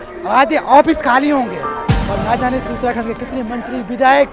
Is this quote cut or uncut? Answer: uncut